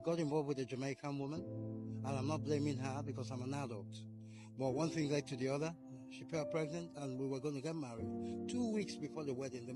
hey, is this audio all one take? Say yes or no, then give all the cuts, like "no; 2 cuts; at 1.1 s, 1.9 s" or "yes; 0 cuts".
yes; 0 cuts